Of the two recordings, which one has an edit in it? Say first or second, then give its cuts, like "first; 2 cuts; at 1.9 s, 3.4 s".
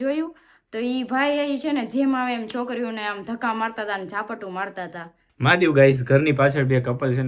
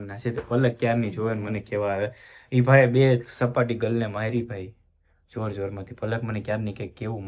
first; 1 cut; at 5.3 s